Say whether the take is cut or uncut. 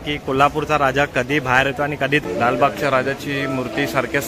cut